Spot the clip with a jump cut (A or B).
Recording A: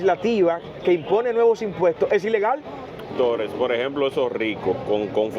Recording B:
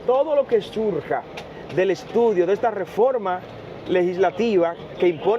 A